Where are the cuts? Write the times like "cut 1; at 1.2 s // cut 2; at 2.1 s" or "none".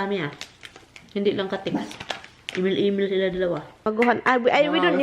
cut 1; at 3.9 s